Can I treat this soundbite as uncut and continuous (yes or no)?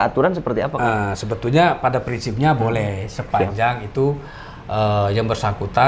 yes